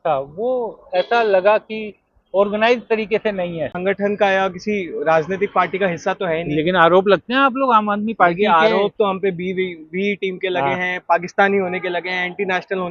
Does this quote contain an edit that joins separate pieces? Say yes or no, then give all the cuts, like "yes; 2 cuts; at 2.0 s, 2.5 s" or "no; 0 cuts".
yes; 1 cut; at 3.7 s